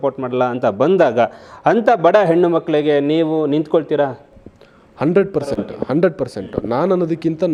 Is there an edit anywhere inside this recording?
no; 0 cuts

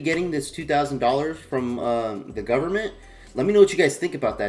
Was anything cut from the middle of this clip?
no; 0 cuts

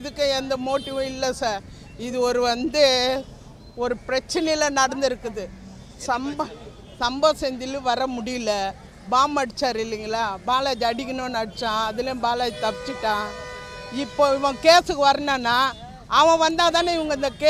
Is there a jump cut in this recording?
no; 0 cuts

